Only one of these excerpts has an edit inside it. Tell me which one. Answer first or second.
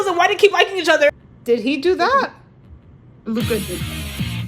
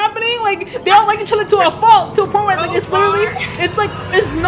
first